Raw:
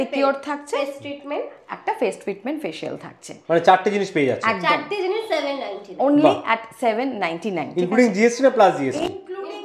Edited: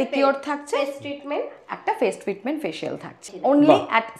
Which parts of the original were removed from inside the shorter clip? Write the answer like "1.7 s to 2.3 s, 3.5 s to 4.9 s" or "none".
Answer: 3.2 s to 5.8 s